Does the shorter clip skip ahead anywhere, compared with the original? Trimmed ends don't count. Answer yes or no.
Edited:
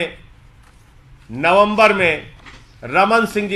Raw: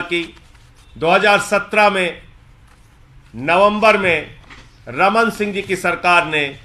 no